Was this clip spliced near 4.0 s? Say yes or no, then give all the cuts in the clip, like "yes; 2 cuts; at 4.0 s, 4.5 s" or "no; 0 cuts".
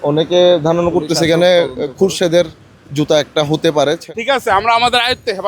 yes; 1 cut; at 4.0 s